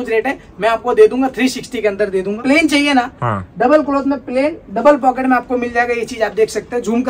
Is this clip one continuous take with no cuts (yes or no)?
no